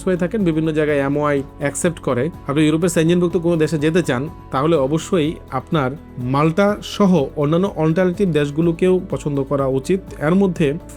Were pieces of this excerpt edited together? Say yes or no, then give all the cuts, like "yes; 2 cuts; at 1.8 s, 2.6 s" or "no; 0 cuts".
no; 0 cuts